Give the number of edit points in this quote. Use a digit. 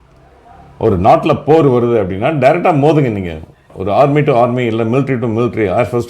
0